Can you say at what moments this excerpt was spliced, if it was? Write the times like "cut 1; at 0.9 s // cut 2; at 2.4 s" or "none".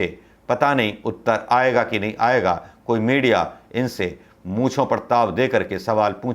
none